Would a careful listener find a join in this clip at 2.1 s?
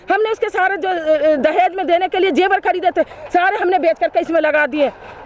no; 0 cuts

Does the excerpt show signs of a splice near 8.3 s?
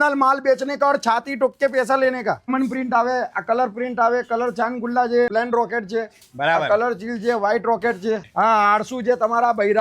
yes; 3 cuts; at 2.5 s, 5.3 s, 8.3 s

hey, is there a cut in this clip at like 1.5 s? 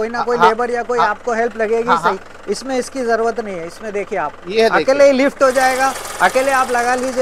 no; 0 cuts

